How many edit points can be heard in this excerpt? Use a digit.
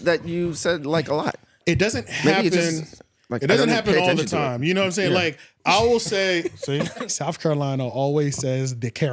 1